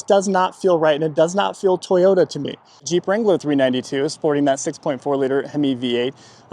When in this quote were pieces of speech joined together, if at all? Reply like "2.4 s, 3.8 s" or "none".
2.8 s

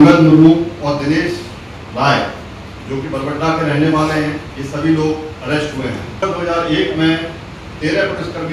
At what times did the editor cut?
6.2 s

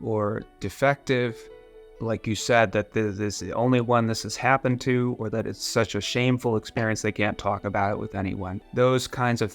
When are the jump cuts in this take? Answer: 8.5 s

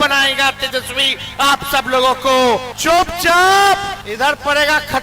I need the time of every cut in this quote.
2.7 s, 4.0 s

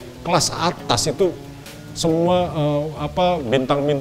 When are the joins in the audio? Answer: none

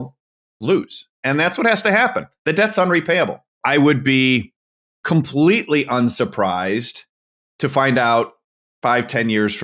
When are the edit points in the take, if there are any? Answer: 3.6 s

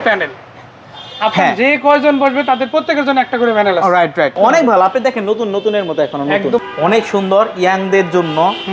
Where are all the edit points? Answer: 4.3 s, 6.6 s

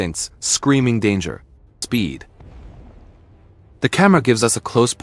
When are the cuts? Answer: 1.8 s

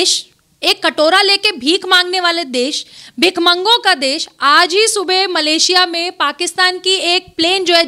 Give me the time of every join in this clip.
none

